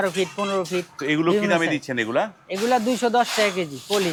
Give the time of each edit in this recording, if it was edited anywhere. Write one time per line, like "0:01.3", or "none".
none